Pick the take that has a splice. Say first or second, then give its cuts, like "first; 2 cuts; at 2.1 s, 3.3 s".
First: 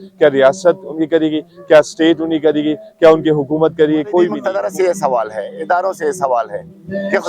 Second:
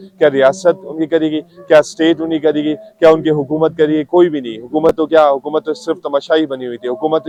first; 1 cut; at 4.4 s